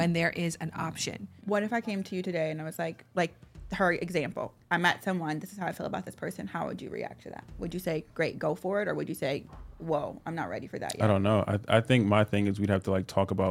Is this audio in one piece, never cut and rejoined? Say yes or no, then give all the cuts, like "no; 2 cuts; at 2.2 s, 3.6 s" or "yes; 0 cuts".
no; 1 cut; at 1.4 s